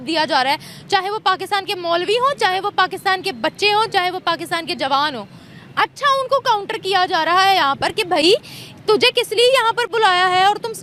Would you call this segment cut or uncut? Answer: uncut